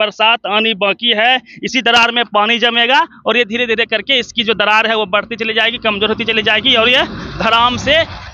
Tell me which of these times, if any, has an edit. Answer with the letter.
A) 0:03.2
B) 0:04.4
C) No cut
C